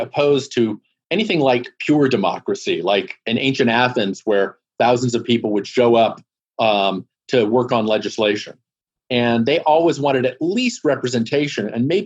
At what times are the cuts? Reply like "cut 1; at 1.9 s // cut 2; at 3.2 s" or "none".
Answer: none